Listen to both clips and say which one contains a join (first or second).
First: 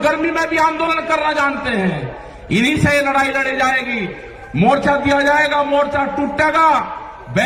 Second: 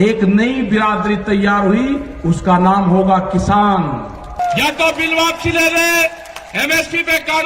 second